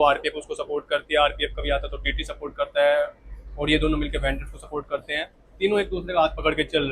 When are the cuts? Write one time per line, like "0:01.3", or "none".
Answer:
none